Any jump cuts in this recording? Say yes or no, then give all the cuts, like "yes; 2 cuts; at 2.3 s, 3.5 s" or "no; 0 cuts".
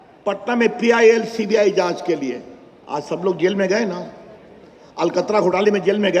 no; 0 cuts